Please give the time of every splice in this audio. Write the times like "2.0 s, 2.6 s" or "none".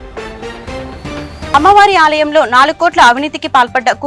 1.5 s